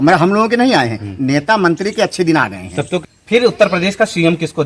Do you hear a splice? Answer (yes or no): yes